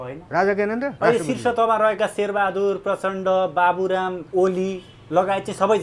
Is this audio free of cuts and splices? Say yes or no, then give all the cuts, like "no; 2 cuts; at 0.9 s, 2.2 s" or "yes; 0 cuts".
no; 2 cuts; at 0.9 s, 4.2 s